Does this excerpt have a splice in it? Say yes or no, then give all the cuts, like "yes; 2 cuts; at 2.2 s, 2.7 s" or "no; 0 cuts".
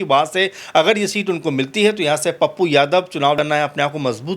yes; 1 cut; at 3.4 s